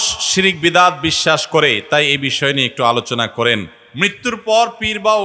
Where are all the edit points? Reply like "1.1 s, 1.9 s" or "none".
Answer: 3.7 s